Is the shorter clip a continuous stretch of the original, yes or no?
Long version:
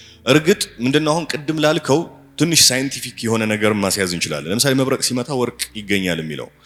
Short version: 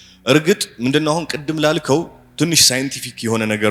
yes